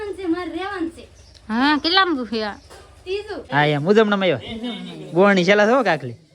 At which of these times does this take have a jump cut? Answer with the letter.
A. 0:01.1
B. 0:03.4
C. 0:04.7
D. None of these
B